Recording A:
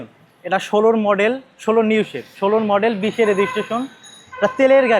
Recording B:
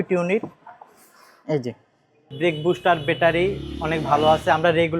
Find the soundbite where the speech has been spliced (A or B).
B